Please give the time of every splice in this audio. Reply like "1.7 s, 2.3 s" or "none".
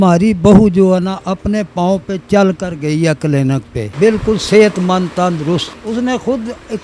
3.8 s, 5.8 s